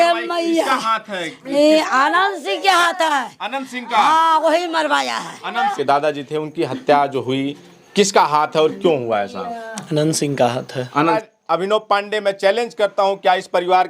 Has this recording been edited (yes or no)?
yes